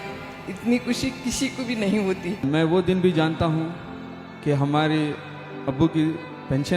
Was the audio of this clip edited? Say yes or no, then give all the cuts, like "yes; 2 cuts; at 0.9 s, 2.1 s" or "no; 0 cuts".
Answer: yes; 1 cut; at 2.4 s